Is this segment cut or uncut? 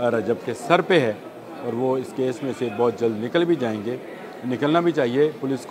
uncut